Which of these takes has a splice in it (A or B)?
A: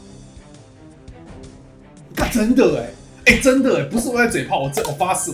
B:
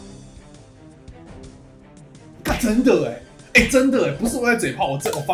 A